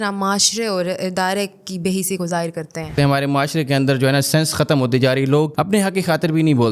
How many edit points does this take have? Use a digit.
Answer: 2